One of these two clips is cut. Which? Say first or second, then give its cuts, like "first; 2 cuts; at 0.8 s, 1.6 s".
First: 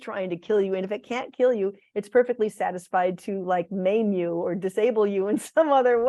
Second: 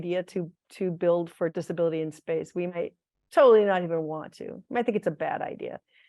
second; 1 cut; at 1.5 s